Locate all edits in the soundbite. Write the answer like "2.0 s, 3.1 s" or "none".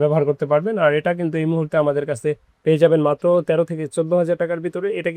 none